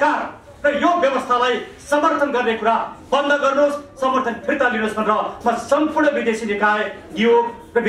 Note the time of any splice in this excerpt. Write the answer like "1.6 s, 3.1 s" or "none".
none